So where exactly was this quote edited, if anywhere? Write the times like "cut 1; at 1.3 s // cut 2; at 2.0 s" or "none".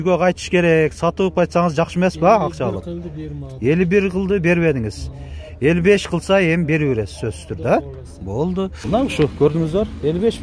cut 1; at 8.8 s